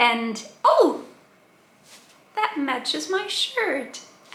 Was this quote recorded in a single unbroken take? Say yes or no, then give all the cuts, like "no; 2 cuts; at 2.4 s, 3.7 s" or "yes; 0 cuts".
yes; 0 cuts